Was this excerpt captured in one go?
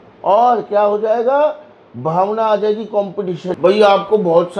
no; 1 cut; at 3.5 s

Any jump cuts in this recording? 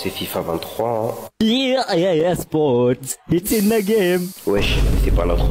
no; 0 cuts

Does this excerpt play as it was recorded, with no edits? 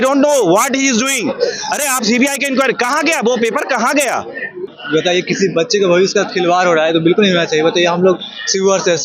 no; 1 cut; at 4.8 s

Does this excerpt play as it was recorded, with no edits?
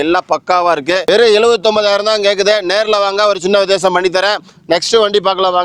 yes; 0 cuts

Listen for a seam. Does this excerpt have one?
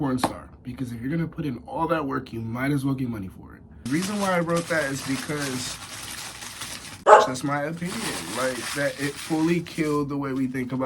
yes; 1 cut; at 3.7 s

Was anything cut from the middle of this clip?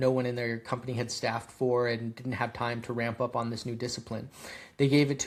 no; 0 cuts

